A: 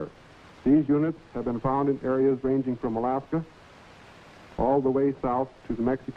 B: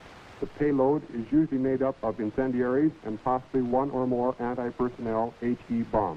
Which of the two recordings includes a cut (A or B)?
A